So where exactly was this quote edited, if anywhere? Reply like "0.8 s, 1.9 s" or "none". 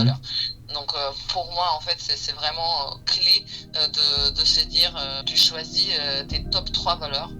5.2 s